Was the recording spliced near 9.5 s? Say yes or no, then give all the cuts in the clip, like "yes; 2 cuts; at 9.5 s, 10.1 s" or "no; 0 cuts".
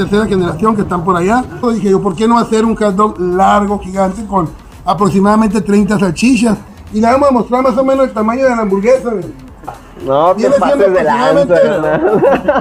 no; 2 cuts; at 1.6 s, 6.8 s